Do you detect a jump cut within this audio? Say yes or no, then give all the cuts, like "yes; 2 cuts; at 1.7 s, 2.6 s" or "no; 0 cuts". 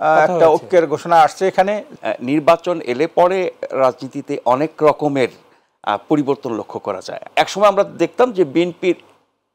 yes; 2 cuts; at 1.9 s, 7.3 s